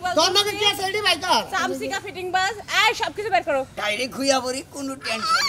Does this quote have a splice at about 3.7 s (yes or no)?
yes